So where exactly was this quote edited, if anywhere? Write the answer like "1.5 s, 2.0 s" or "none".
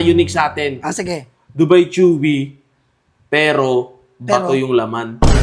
none